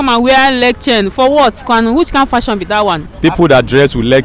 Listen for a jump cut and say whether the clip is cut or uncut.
cut